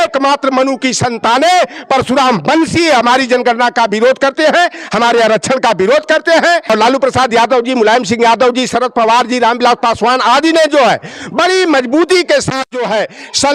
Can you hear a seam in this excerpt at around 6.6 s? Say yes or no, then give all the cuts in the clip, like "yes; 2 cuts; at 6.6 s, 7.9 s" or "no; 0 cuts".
yes; 1 cut; at 6.6 s